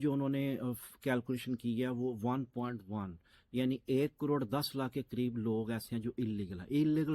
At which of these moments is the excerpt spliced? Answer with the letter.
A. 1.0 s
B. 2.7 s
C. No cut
C